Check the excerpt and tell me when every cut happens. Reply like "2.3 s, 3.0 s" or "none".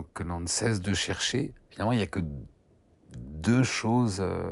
1.6 s